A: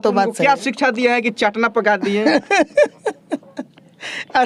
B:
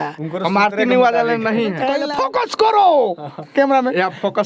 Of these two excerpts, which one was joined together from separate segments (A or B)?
B